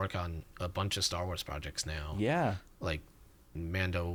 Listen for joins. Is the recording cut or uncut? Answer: uncut